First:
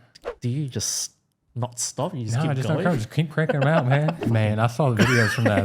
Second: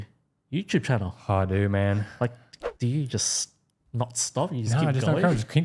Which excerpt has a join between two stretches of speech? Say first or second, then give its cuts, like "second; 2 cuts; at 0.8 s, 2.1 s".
first; 1 cut; at 4.2 s